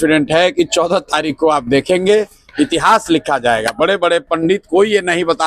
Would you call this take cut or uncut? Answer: uncut